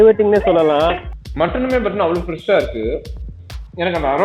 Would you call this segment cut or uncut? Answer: cut